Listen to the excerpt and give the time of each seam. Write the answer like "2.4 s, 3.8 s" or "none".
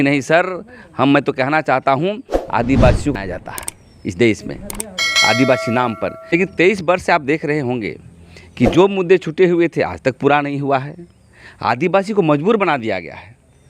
3.1 s, 6.2 s